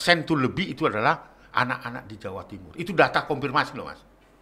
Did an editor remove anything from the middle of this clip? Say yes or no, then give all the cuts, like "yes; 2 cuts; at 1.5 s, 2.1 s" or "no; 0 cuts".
no; 0 cuts